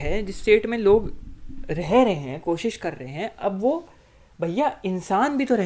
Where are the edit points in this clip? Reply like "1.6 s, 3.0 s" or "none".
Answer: none